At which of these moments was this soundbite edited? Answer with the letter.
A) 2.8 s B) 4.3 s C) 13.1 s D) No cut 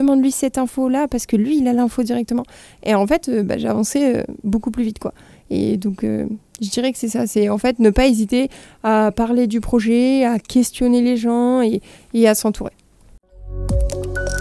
C